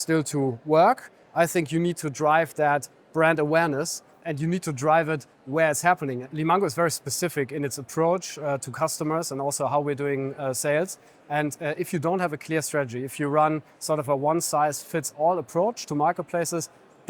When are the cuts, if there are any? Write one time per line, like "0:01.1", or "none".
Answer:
0:04.2
0:06.2